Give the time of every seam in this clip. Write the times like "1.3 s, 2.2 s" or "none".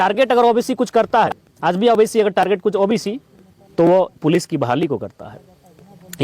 1.4 s

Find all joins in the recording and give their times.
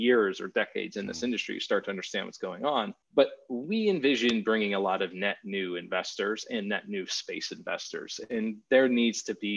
3.0 s

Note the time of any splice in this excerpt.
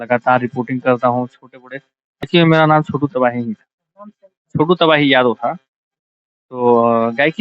2.2 s

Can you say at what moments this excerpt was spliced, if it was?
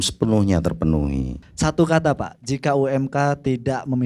1.4 s

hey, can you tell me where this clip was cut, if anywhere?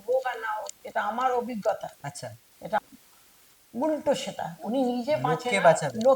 2.8 s

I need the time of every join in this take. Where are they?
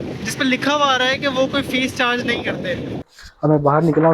3.2 s

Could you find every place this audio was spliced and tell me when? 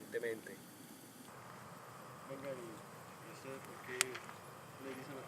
1.0 s

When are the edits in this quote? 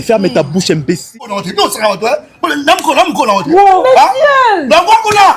1.1 s

